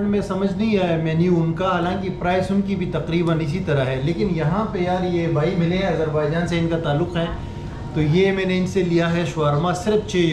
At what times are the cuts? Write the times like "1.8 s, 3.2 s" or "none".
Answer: none